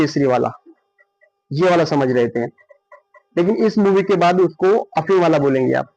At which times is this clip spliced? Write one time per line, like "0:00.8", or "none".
none

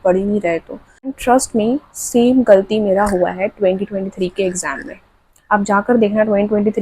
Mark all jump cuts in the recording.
0:01.2

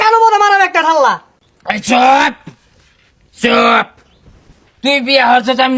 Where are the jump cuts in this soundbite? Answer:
none

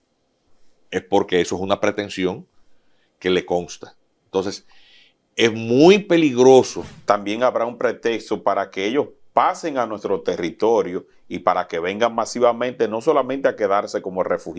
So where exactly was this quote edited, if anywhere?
0:06.8

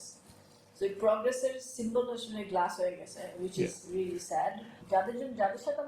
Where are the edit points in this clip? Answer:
0:04.7

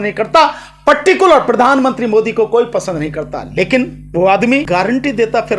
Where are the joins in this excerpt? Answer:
0:04.7

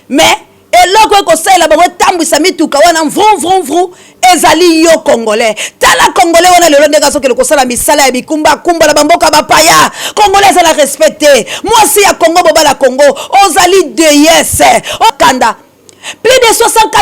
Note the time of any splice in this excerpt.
0:15.1

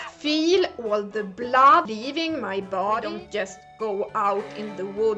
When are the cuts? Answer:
0:03.1

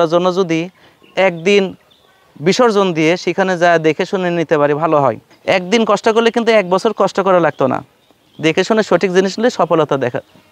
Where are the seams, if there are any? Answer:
0:05.3

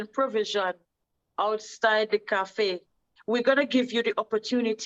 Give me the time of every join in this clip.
0:03.1

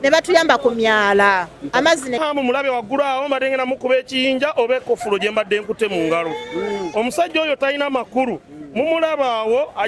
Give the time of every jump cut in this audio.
0:02.2

